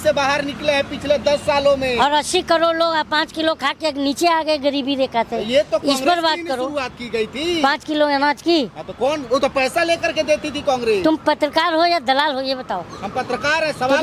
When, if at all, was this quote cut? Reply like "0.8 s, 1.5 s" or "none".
none